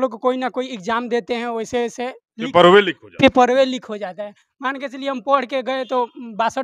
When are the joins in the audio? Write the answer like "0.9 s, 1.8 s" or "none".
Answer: none